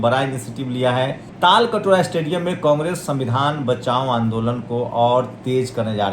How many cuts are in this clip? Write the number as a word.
one